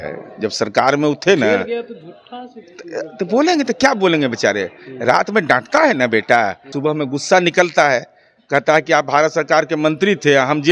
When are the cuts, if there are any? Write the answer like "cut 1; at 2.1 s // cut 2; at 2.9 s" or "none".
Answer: cut 1; at 6.7 s